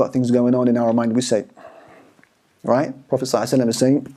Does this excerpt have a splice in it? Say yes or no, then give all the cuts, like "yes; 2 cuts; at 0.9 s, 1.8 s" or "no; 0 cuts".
no; 0 cuts